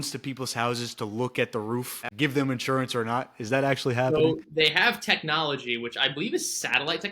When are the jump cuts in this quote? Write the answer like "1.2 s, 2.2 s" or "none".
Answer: 2.0 s